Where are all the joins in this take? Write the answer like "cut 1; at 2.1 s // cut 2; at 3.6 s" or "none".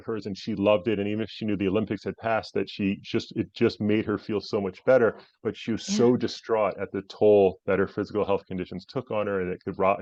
none